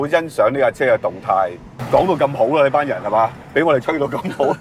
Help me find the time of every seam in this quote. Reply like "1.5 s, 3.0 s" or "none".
none

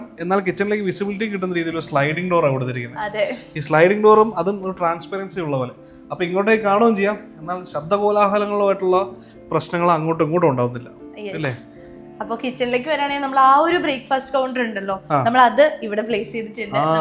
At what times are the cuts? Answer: none

